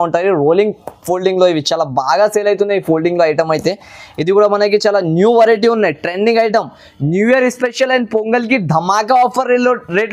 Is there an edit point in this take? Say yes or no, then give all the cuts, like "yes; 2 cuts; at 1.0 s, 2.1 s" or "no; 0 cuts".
no; 0 cuts